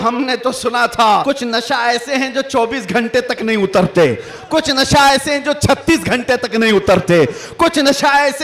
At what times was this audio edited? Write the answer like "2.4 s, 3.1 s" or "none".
1.2 s